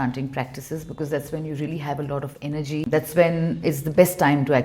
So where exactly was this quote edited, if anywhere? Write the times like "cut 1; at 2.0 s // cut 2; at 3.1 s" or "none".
cut 1; at 2.9 s